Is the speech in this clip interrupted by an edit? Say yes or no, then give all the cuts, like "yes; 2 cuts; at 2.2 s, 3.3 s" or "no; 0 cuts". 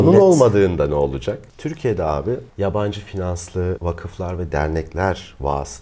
yes; 2 cuts; at 1.5 s, 3.8 s